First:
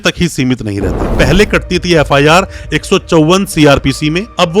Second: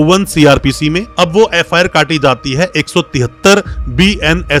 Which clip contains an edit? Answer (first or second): first